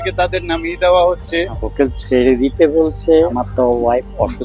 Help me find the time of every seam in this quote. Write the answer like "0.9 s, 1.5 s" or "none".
1.6 s, 3.3 s